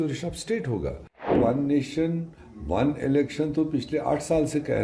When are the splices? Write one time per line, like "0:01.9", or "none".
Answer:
0:01.4

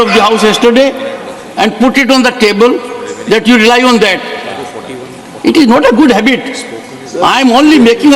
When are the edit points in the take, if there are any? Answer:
none

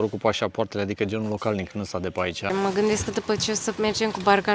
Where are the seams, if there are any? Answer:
0:02.5

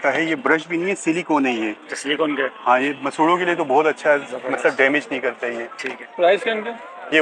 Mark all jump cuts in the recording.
none

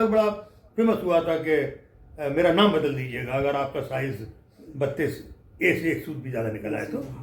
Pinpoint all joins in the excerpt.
none

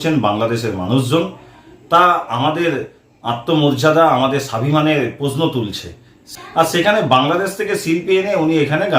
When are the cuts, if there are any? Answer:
0:06.2

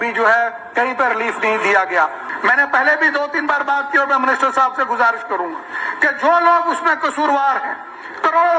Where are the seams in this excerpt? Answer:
0:02.2

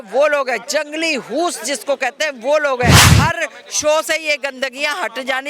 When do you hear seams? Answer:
0:03.1

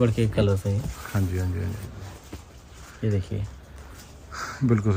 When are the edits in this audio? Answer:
none

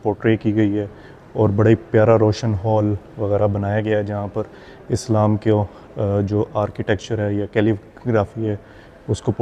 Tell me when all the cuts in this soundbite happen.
none

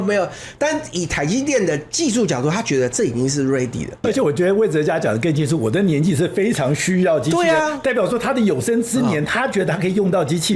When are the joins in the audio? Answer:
0:04.0

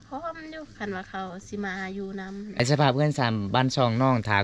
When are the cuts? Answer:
0:02.6

